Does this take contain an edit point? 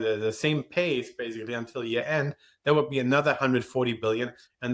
no; 0 cuts

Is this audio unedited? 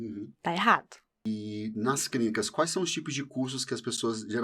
no; 1 cut; at 1.1 s

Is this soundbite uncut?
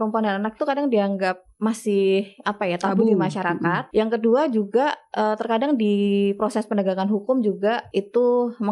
no; 2 cuts; at 3.8 s, 7.8 s

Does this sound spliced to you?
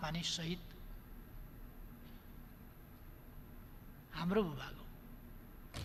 no; 0 cuts

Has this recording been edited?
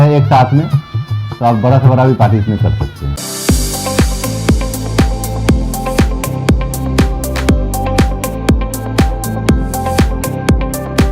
yes; 1 cut; at 3.1 s

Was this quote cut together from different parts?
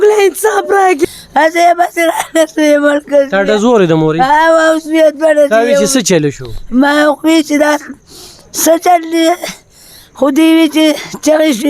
yes; 1 cut; at 1.0 s

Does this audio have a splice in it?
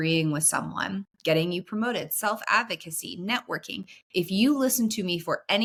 no; 0 cuts

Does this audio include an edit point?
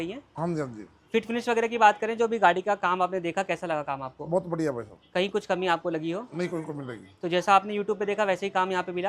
no; 0 cuts

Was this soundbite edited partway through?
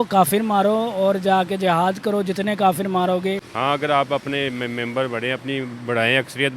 yes; 1 cut; at 3.5 s

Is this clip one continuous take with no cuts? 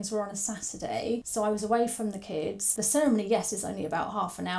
no; 2 cuts; at 1.3 s, 2.7 s

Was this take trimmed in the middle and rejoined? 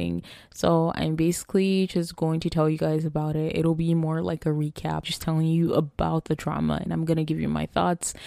no; 0 cuts

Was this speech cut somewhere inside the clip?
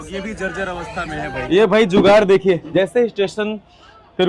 yes; 2 cuts; at 1.5 s, 2.6 s

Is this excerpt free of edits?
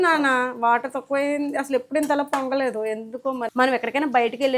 no; 1 cut; at 3.5 s

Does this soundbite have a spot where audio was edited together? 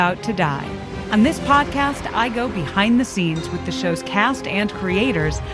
yes; 1 cut; at 0.9 s

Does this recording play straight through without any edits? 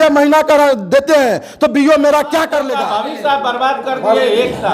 no; 1 cut; at 2.7 s

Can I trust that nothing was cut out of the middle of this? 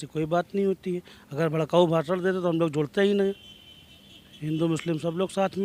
yes; 0 cuts

